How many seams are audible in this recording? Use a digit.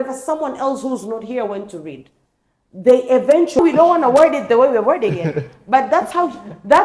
1